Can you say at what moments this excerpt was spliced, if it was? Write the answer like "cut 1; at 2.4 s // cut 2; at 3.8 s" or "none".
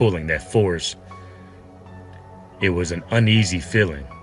cut 1; at 1.2 s // cut 2; at 2.6 s